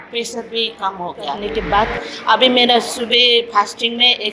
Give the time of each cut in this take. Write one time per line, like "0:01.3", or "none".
0:01.4

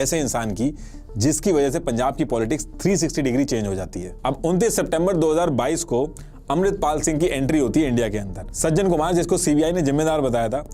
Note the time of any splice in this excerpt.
0:04.1
0:08.4

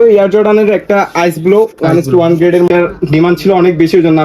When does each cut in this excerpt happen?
0:02.7

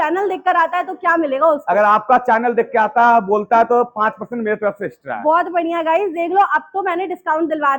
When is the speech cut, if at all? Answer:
none

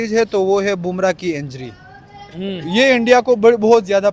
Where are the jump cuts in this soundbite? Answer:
none

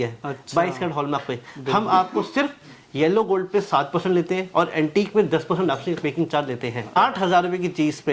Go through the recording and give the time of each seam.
0:07.0

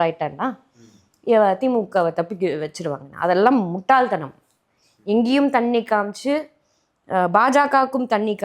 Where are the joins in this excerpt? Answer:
none

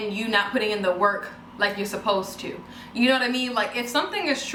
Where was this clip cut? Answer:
none

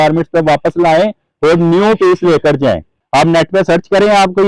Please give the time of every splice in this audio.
0:02.9

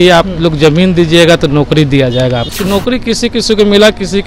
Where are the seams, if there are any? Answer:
0:02.5

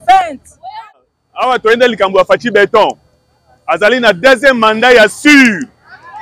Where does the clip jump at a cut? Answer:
0:00.9

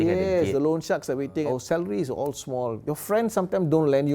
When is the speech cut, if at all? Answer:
0:01.5
0:02.8

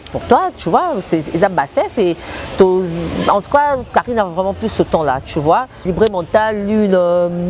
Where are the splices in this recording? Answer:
0:05.8

